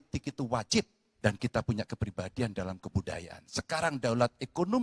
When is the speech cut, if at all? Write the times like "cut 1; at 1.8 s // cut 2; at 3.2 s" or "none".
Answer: cut 1; at 1.0 s